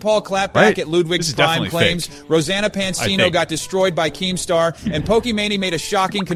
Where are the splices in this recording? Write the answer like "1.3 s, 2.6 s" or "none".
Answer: none

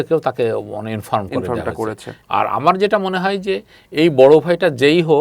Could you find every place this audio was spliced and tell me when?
2.1 s

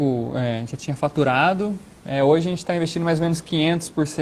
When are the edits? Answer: none

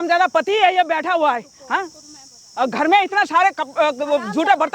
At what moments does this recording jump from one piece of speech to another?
none

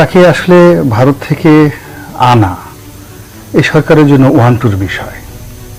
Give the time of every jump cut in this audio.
none

